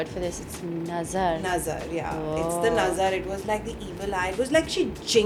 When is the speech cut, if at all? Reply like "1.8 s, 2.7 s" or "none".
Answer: none